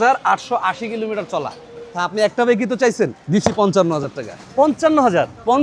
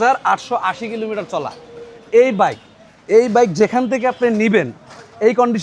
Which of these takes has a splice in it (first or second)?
first